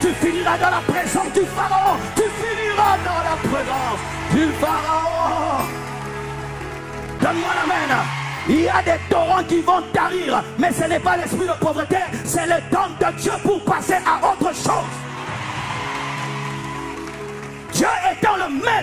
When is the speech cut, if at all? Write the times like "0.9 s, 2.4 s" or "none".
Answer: 7.1 s

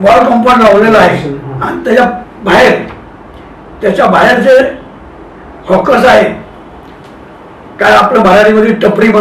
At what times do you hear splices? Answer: none

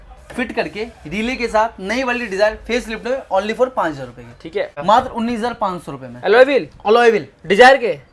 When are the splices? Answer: 4.7 s

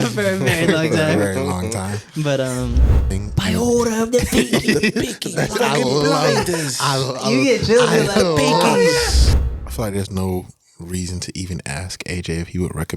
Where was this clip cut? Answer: 3.0 s, 9.3 s

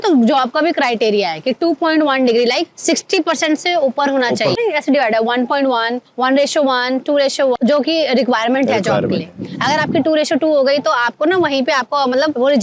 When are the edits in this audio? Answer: 4.6 s, 7.6 s

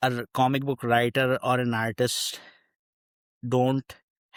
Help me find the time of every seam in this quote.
none

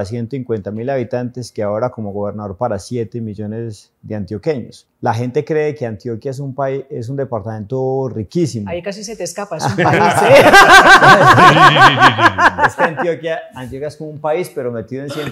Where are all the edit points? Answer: 4.8 s

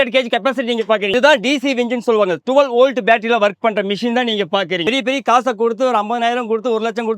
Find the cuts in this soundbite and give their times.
1.1 s, 4.9 s

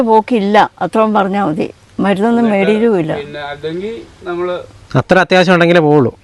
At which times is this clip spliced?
none

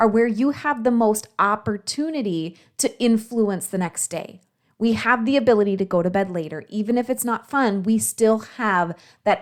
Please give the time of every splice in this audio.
none

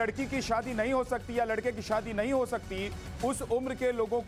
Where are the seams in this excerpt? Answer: 1.8 s

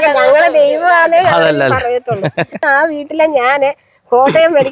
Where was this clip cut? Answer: 2.6 s

